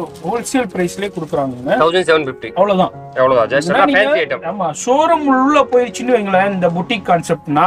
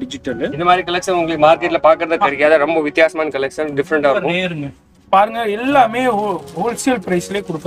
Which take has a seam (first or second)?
second